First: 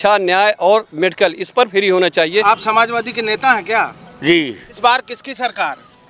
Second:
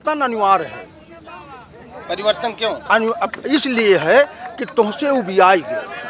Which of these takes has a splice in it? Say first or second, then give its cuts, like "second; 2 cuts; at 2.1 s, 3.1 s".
first; 2 cuts; at 2.4 s, 4.7 s